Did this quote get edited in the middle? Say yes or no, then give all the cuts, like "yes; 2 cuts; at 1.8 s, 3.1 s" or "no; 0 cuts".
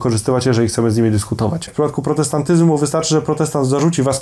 yes; 1 cut; at 1.7 s